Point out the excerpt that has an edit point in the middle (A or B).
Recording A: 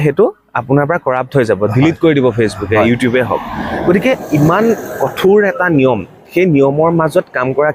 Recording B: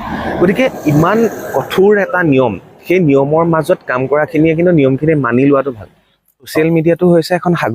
B